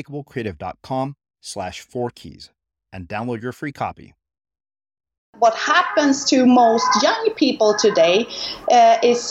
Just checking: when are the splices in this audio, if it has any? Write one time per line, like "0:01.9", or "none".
0:05.3